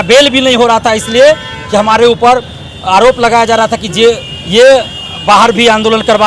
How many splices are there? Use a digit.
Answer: 0